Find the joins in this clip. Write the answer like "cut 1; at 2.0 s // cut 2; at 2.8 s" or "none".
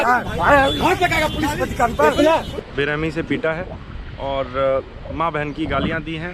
cut 1; at 2.5 s